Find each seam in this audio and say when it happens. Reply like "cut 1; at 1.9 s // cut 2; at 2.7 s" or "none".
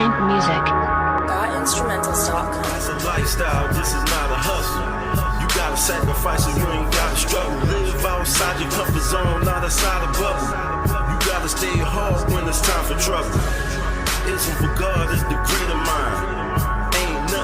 cut 1; at 2.8 s